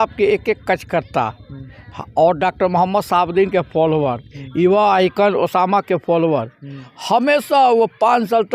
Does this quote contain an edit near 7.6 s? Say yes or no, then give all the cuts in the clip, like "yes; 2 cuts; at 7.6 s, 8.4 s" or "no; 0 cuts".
no; 0 cuts